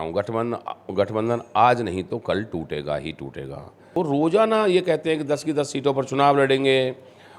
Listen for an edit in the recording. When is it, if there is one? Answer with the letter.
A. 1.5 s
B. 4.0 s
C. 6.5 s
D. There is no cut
B